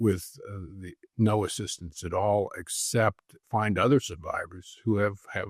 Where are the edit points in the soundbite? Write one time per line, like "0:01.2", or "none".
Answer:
0:03.4